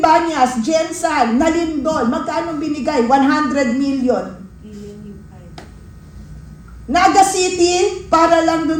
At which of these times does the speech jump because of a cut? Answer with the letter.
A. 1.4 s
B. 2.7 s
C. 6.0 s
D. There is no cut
D